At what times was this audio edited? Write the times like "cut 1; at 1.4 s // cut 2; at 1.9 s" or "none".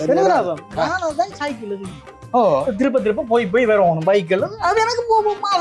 cut 1; at 2.2 s

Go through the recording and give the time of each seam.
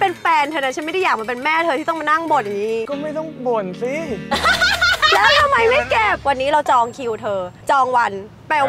cut 1; at 2.9 s // cut 2; at 6.2 s // cut 3; at 7.5 s

